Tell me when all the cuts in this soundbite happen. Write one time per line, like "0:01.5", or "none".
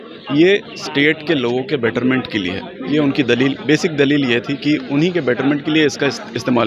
none